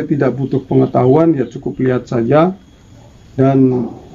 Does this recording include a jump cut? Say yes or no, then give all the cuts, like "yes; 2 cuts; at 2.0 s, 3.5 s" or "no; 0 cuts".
no; 0 cuts